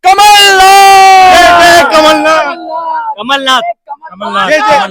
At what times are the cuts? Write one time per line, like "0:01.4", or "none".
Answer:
none